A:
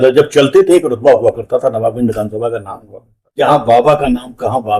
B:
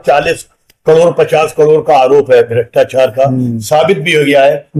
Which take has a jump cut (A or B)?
A